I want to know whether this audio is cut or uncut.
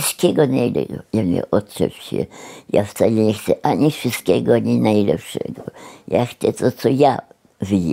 uncut